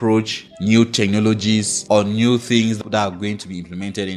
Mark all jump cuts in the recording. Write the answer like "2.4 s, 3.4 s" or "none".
none

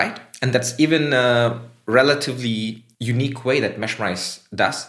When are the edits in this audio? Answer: 2.9 s

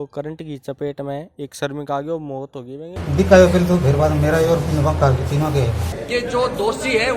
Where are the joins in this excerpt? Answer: 2.9 s, 5.9 s

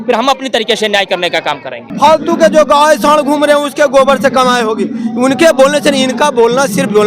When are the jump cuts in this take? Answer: 1.9 s

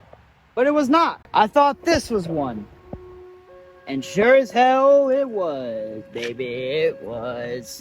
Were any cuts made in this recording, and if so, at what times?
1.2 s

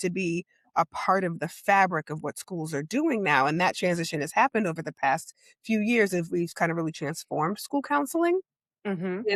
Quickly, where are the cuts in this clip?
none

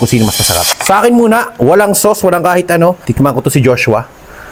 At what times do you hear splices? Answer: none

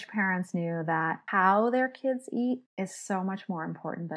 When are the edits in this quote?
1.2 s, 2.7 s

